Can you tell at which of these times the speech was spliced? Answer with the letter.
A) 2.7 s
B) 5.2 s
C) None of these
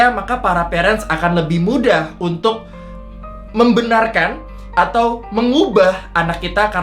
C